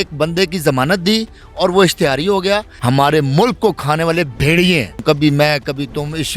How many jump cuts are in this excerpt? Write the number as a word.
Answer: two